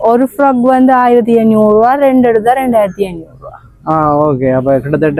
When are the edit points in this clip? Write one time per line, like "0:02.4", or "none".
none